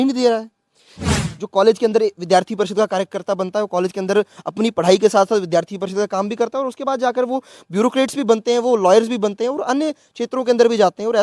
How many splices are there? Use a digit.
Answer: 1